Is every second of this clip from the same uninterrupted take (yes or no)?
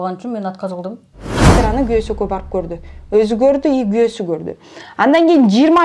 no